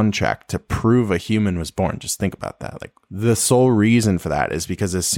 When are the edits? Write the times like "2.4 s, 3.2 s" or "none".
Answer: none